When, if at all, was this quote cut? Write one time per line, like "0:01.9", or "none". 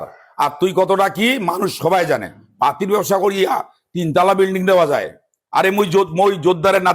none